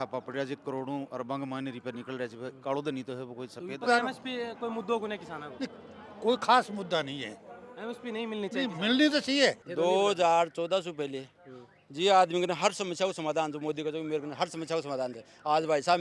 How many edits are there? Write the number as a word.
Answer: two